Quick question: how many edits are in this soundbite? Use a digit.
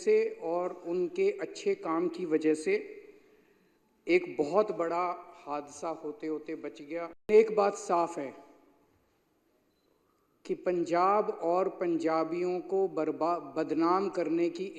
1